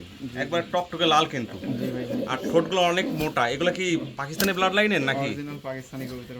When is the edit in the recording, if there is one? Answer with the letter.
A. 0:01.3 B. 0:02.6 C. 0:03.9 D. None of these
D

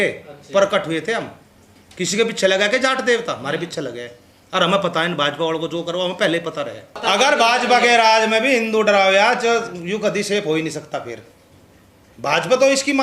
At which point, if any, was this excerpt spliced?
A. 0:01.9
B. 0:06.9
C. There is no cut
B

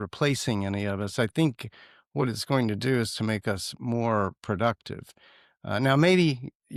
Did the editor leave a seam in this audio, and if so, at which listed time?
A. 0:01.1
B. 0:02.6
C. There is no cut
C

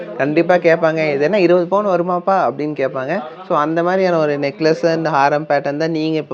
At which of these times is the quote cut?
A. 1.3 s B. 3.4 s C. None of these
C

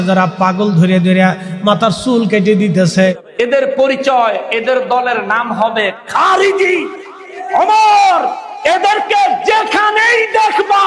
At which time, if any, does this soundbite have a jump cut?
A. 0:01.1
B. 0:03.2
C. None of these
B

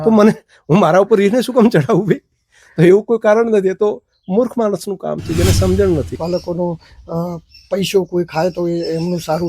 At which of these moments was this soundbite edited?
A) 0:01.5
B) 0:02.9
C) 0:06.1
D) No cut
C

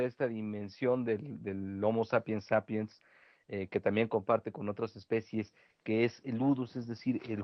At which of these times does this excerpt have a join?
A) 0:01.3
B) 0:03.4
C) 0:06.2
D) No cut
C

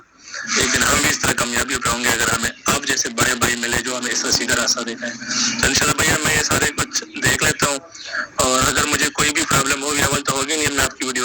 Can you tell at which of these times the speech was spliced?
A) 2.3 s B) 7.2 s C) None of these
B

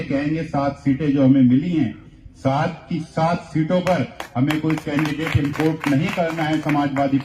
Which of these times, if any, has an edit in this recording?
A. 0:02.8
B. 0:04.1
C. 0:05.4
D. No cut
D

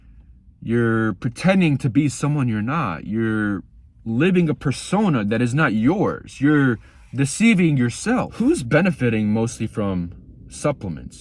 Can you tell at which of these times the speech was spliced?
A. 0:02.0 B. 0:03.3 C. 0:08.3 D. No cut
C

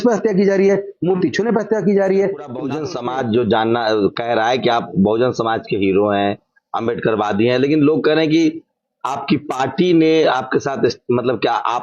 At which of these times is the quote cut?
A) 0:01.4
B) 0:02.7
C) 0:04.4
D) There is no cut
B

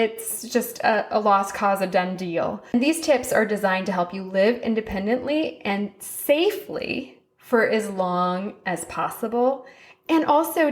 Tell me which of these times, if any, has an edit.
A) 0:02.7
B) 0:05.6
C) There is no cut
A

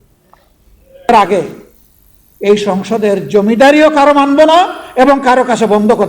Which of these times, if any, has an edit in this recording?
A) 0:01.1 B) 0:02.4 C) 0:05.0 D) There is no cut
A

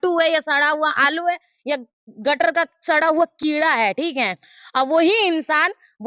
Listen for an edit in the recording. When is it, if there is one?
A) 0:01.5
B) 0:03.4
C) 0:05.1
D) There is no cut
D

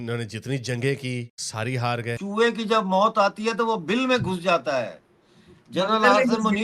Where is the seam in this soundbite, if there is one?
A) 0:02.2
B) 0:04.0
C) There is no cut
A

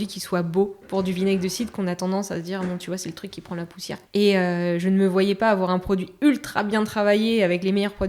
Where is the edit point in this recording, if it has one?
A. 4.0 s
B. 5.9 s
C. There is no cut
A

